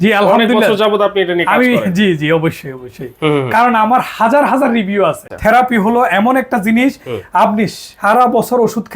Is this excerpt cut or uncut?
cut